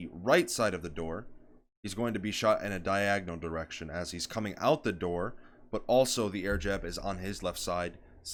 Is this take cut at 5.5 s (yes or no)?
no